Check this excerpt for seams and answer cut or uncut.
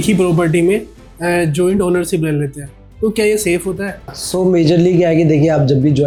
uncut